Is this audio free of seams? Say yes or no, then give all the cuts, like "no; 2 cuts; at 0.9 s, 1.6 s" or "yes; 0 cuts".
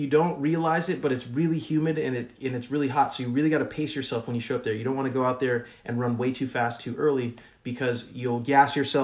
yes; 0 cuts